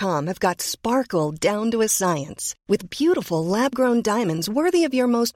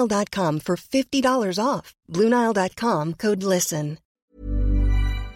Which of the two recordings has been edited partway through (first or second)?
second